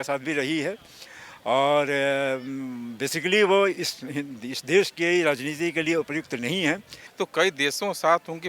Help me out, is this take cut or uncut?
cut